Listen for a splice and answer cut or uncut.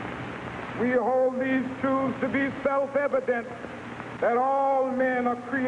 uncut